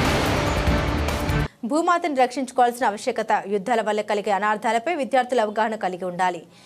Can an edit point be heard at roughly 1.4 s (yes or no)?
yes